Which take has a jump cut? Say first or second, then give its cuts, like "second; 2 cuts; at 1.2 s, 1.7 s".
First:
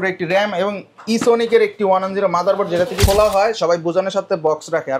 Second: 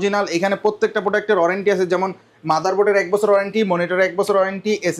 first; 1 cut; at 3.0 s